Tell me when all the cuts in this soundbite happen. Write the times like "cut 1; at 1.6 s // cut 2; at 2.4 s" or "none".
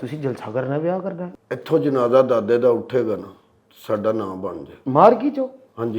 cut 1; at 1.3 s